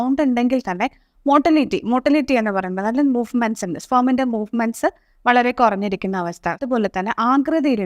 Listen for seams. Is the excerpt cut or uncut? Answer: cut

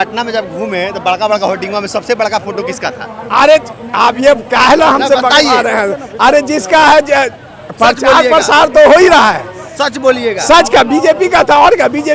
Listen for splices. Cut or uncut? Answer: uncut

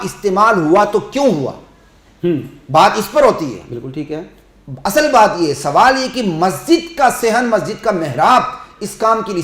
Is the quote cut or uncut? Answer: uncut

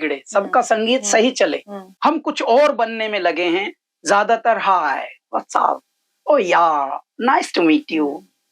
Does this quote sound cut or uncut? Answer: cut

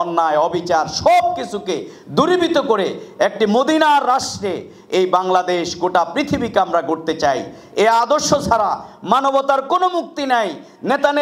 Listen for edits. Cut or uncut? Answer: uncut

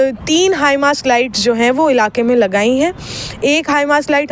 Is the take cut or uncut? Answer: uncut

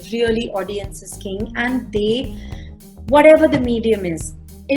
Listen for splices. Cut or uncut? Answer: uncut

